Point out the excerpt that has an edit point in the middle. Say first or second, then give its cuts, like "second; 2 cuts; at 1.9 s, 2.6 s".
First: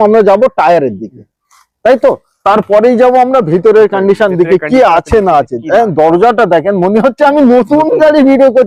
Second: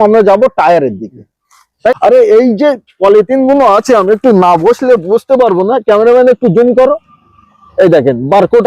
second; 1 cut; at 2.0 s